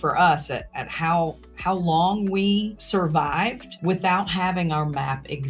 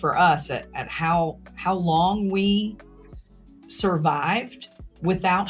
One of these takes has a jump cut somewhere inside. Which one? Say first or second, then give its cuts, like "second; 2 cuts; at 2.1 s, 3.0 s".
first; 2 cuts; at 2.8 s, 3.7 s